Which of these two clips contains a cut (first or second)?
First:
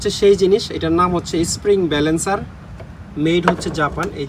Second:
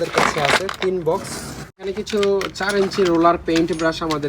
second